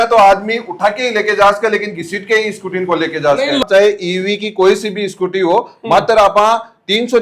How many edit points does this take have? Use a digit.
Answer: 1